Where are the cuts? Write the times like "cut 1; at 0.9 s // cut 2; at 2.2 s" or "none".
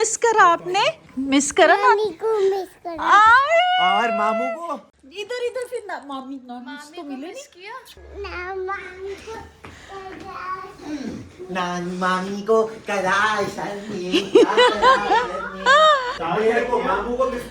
cut 1; at 1.1 s // cut 2; at 5.0 s // cut 3; at 8.0 s // cut 4; at 16.1 s